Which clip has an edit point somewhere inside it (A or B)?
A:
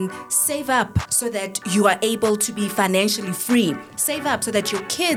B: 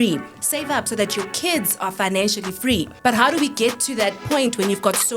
B